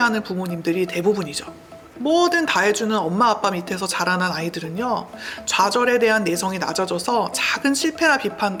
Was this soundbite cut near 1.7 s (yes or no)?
no